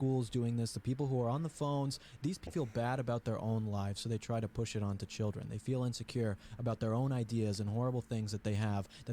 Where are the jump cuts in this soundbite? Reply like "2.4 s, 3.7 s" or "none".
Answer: 2.5 s